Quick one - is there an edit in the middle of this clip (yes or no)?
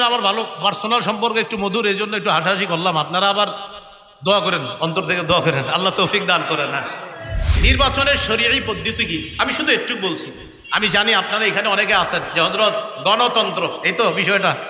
yes